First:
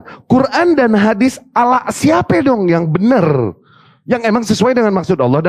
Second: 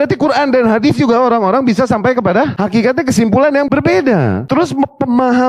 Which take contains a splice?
second; 3 cuts; at 2.5 s, 3.7 s, 4.4 s

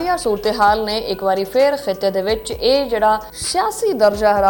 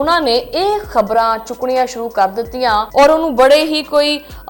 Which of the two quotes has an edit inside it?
second; 1 cut; at 2.9 s

